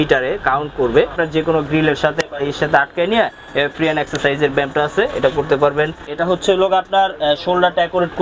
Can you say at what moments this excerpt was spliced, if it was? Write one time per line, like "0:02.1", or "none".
0:01.1
0:06.1